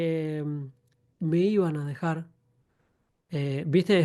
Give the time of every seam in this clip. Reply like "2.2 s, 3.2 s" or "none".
none